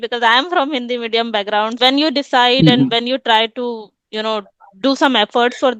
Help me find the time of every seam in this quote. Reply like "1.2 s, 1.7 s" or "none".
1.7 s